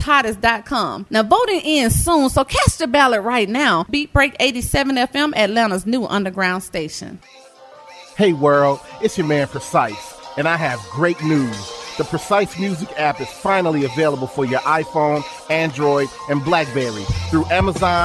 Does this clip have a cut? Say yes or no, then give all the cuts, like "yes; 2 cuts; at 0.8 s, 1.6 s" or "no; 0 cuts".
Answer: yes; 1 cut; at 7.1 s